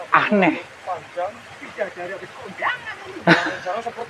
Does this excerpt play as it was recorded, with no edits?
yes; 0 cuts

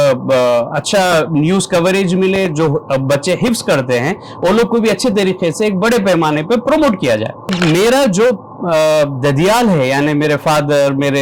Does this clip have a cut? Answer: yes; 1 cut; at 7.5 s

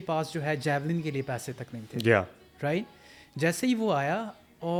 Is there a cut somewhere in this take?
no; 0 cuts

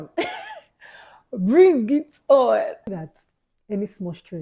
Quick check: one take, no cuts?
no; 1 cut; at 2.9 s

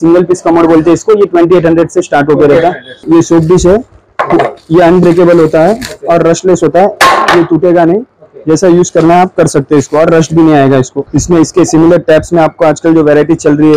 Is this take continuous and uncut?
no; 2 cuts; at 3.0 s, 11.0 s

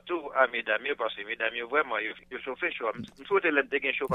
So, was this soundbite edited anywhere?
yes; 1 cut; at 2.2 s

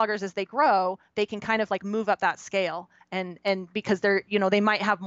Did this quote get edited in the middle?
no; 0 cuts

